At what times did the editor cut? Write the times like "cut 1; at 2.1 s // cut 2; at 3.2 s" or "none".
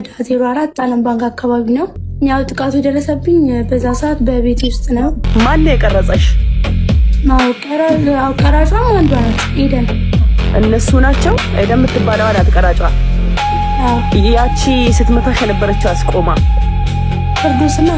cut 1; at 2.0 s // cut 2; at 5.3 s